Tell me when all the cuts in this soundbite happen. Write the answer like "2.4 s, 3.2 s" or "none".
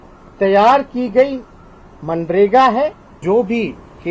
3.1 s